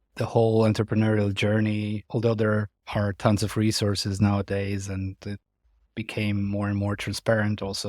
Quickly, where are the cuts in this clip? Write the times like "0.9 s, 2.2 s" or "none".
2.0 s